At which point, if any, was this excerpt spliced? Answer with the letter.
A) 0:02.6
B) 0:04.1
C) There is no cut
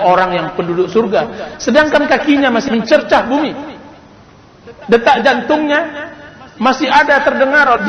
A